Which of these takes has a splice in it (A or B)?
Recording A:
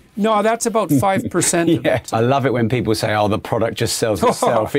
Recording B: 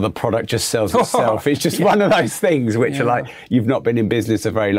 A